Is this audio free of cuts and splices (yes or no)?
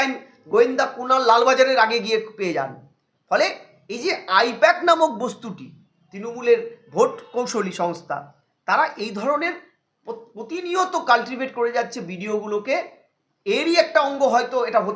yes